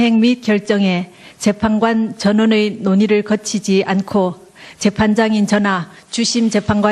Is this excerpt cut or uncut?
cut